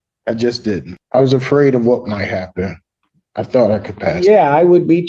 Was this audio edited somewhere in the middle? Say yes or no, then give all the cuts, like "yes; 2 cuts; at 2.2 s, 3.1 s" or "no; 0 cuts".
yes; 1 cut; at 0.9 s